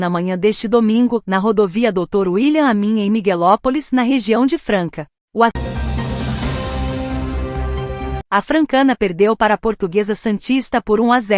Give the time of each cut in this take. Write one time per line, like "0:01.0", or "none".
0:05.5
0:08.2